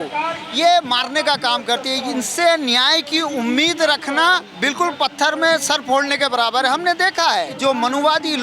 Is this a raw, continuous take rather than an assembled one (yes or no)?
no